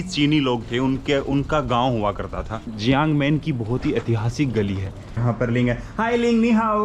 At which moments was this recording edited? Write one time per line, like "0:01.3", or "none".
0:05.2